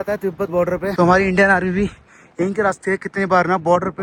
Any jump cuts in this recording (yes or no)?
no